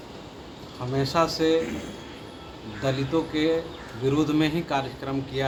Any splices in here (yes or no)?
no